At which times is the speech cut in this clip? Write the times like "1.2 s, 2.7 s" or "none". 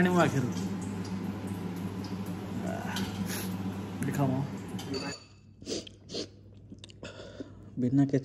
5.2 s